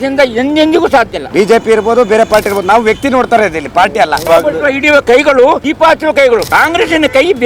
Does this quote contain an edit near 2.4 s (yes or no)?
no